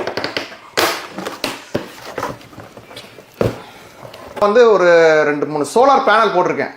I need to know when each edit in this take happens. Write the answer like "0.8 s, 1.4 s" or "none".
2.0 s, 4.4 s